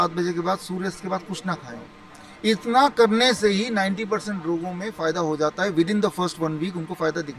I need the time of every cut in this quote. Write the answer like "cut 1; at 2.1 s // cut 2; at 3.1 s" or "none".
none

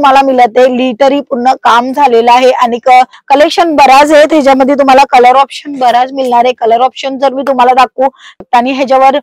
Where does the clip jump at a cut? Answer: cut 1; at 3.2 s // cut 2; at 8.4 s

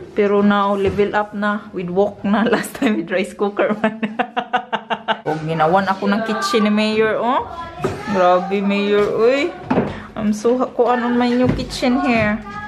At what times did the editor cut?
cut 1; at 5.2 s

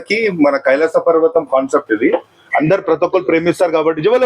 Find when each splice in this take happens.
cut 1; at 2.4 s

